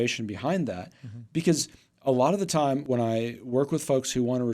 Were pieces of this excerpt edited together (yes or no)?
yes